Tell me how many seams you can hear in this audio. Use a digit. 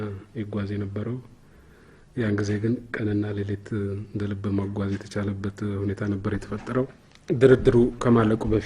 1